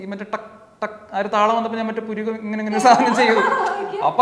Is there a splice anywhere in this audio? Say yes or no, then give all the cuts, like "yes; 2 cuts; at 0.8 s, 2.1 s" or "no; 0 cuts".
no; 0 cuts